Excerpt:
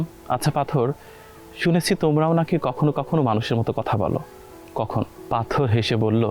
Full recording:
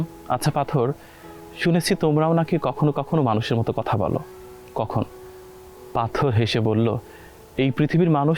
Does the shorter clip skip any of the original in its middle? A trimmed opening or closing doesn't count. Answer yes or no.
yes